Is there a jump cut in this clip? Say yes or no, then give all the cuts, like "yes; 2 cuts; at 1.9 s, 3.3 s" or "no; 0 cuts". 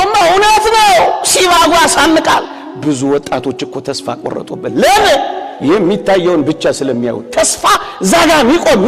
no; 0 cuts